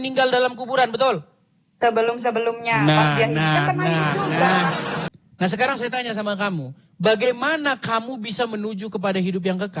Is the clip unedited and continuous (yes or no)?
no